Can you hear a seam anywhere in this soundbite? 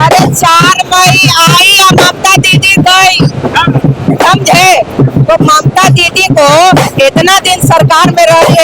no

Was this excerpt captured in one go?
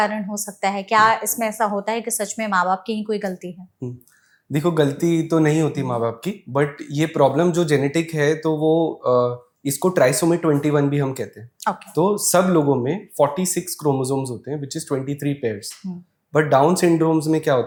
yes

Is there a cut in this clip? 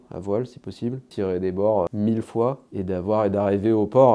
yes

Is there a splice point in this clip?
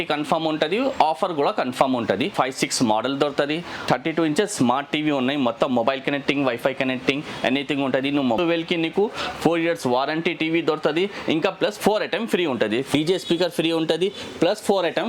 yes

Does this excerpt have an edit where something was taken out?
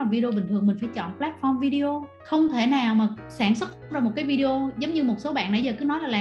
yes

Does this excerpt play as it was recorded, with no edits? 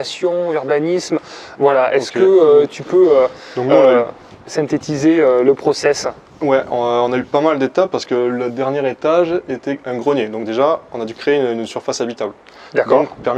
yes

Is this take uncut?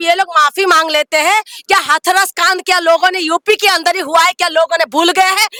yes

